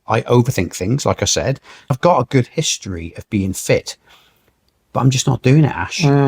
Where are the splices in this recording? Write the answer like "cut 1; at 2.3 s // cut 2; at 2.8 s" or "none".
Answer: cut 1; at 1.9 s